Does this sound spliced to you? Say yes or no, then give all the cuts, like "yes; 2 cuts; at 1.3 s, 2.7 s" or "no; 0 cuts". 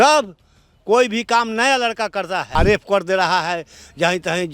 yes; 1 cut; at 2.5 s